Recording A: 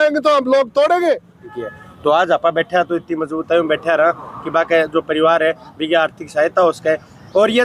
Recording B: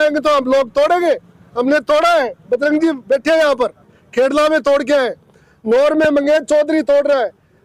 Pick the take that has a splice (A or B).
A